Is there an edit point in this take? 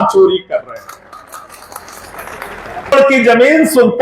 yes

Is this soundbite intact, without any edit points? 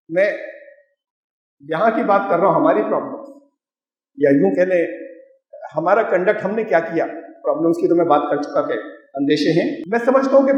yes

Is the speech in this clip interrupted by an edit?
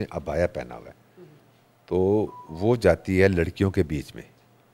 no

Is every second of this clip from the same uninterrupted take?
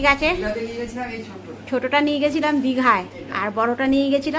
yes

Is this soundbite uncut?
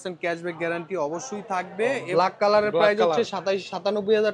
no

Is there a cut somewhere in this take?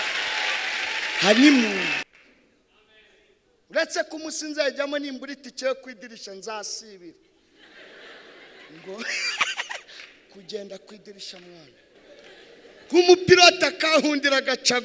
yes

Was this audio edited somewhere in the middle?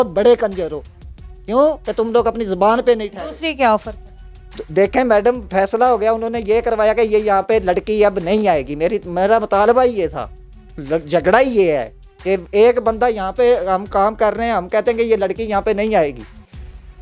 no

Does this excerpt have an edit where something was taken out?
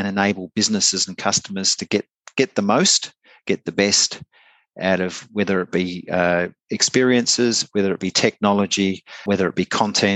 yes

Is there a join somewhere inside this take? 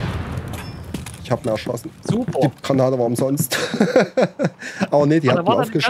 no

